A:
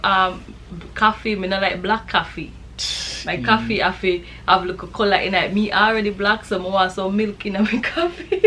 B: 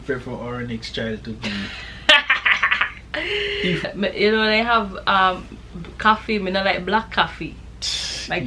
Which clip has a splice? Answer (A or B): B